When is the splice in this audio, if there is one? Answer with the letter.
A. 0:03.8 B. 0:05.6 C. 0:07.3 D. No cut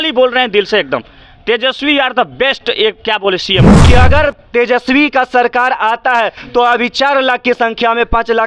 A